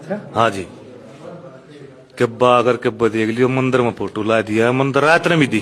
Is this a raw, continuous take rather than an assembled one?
yes; 0 cuts

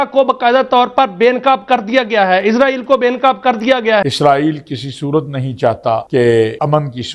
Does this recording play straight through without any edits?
yes; 0 cuts

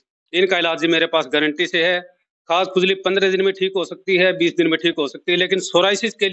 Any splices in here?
no; 0 cuts

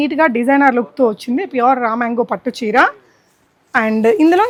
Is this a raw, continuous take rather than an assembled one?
yes; 0 cuts

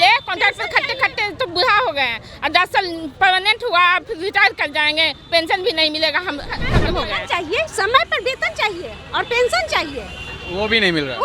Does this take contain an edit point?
yes; 1 cut; at 6.7 s

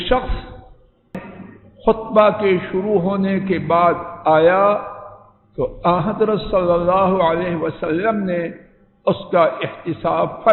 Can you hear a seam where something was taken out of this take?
yes; 1 cut; at 1.2 s

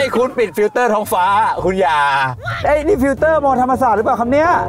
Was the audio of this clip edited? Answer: yes; 1 cut; at 2.4 s

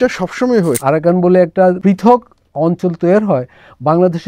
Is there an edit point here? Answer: yes; 2 cuts; at 0.8 s, 1.8 s

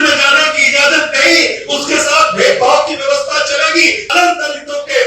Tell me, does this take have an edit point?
yes; 1 cut; at 4.0 s

